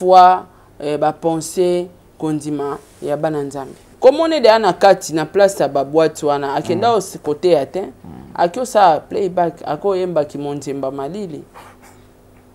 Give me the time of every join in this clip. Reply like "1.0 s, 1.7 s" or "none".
3.8 s